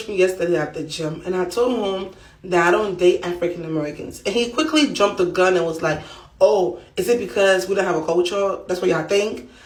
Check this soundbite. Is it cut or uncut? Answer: uncut